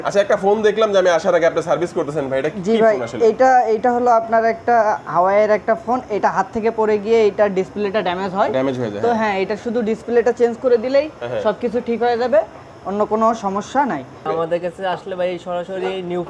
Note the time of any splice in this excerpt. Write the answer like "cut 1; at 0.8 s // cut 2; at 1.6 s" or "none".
cut 1; at 14.3 s